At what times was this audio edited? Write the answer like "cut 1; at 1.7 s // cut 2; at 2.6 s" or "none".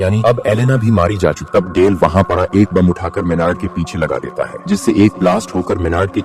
cut 1; at 1.4 s